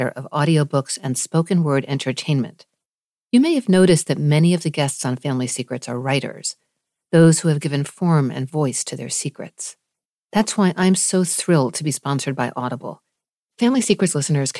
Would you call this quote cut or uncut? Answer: uncut